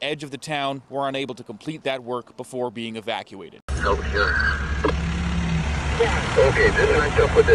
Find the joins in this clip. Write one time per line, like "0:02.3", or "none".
0:03.6